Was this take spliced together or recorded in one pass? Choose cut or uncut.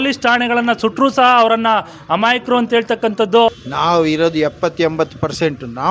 cut